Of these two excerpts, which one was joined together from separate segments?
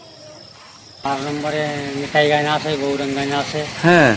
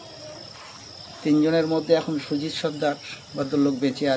first; 1 cut; at 1.1 s

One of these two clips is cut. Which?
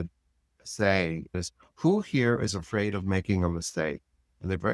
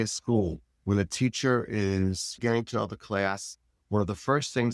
first; 1 cut; at 1.3 s

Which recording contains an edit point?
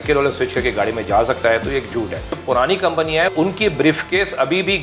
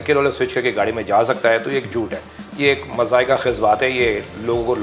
first; 2 cuts; at 2.4 s, 3.3 s

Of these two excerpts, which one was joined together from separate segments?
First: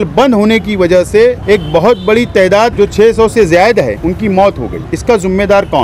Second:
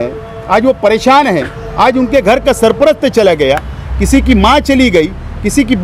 first; 4 cuts; at 1.4 s, 2.7 s, 4.0 s, 4.8 s

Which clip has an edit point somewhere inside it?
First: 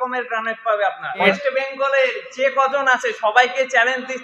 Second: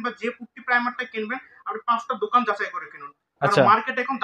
first; 1 cut; at 1.2 s

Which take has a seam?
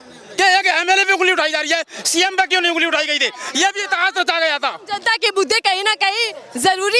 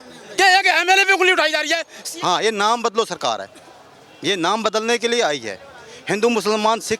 second; 1 cut; at 2.0 s

